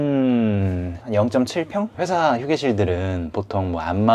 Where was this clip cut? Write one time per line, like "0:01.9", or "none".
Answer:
0:01.9